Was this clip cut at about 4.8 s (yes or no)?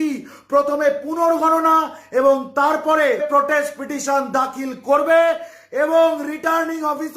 no